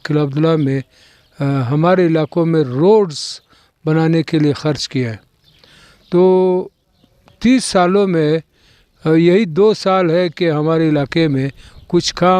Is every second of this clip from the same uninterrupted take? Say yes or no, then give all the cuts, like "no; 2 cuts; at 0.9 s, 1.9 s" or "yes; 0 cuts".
yes; 0 cuts